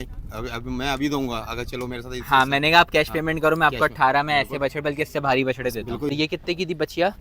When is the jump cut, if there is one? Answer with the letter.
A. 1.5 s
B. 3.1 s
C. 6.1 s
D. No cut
C